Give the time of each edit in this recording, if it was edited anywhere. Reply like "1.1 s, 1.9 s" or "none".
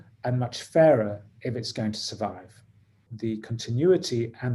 3.1 s